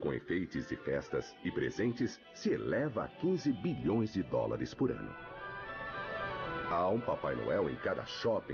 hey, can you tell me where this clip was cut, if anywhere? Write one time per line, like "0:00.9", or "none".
0:06.2